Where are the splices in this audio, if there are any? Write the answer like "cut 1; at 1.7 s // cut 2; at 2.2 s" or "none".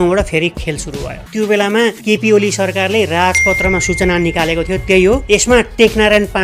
cut 1; at 1.2 s